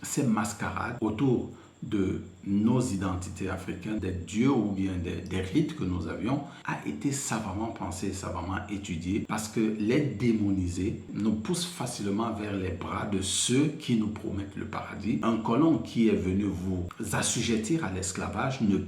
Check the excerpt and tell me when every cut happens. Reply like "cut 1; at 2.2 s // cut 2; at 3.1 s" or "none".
cut 1; at 0.9 s // cut 2; at 4.0 s // cut 3; at 6.6 s // cut 4; at 9.3 s // cut 5; at 15.2 s